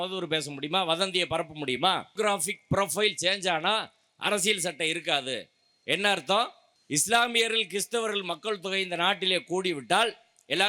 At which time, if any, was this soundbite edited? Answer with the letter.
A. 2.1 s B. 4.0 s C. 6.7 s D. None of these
A